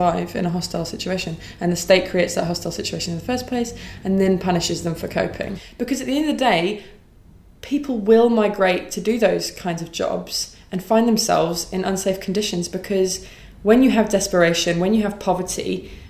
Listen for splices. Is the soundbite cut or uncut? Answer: cut